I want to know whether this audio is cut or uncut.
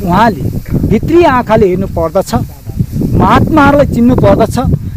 uncut